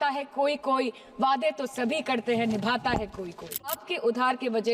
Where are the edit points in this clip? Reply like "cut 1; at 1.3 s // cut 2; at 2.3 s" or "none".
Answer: cut 1; at 3.7 s